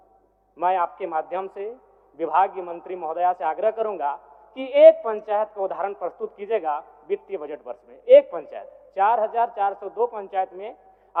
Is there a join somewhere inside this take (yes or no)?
no